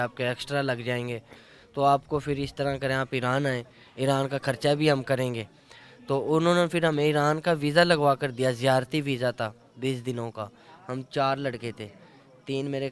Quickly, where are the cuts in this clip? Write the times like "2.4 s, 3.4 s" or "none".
none